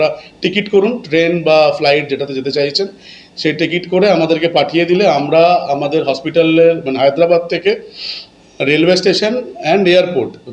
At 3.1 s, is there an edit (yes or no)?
no